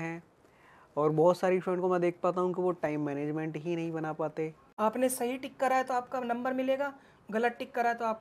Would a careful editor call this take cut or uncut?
cut